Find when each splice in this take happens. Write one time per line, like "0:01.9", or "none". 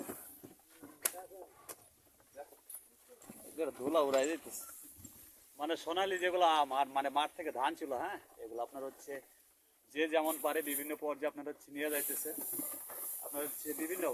none